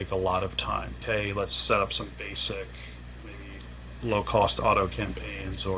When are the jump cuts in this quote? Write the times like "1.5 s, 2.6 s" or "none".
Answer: none

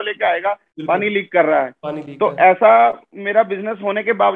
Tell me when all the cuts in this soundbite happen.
none

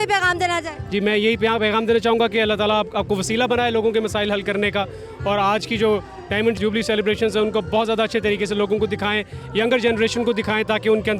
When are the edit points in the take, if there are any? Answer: none

